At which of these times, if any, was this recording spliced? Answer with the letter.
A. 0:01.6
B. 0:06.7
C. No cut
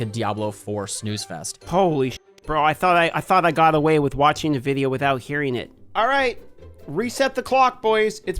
A